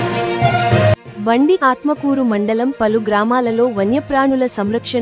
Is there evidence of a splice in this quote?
yes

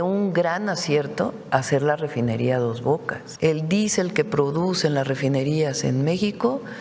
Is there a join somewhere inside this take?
yes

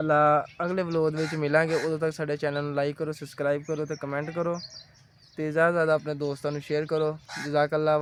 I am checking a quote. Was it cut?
no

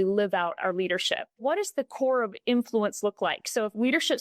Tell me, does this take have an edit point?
yes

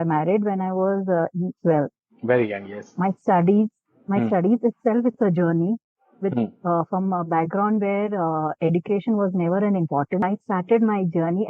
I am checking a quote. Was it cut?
yes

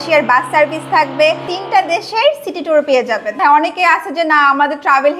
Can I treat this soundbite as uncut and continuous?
no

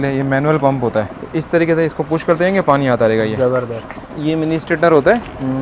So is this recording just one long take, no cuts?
no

